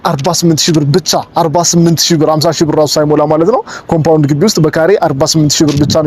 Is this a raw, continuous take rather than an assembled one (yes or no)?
yes